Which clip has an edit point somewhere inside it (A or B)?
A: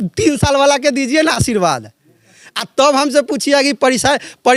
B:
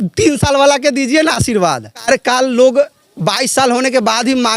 B